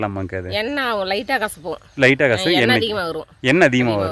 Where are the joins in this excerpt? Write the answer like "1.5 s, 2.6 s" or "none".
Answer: none